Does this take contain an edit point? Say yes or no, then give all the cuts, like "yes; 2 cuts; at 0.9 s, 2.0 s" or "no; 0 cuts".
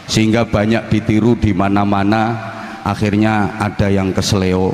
no; 0 cuts